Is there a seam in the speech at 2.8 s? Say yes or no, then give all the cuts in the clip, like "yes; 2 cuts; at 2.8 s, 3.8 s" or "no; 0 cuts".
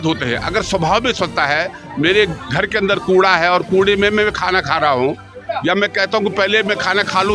no; 0 cuts